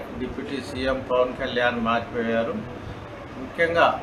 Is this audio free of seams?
yes; 0 cuts

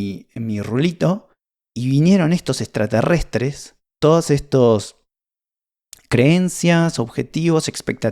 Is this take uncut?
no; 1 cut; at 3.8 s

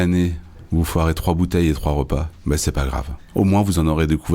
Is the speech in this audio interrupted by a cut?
yes; 1 cut; at 3.1 s

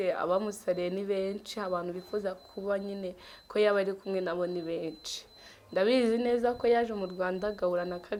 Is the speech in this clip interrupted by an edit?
no; 0 cuts

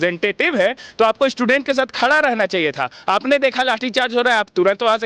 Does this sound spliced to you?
no; 0 cuts

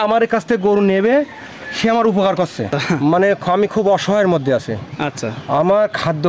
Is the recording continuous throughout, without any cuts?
no; 1 cut; at 2.7 s

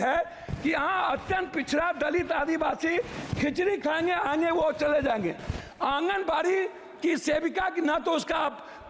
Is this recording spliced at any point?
no; 0 cuts

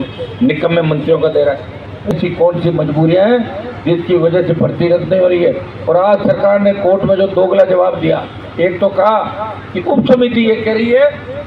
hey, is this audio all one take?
no; 1 cut; at 2.1 s

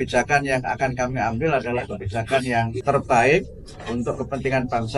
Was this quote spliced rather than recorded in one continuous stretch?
yes; 1 cut; at 2.8 s

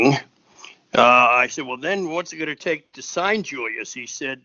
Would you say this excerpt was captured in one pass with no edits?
yes; 0 cuts

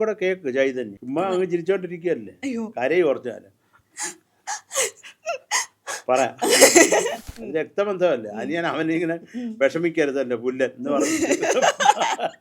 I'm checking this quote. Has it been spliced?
yes; 2 cuts; at 0.9 s, 7.2 s

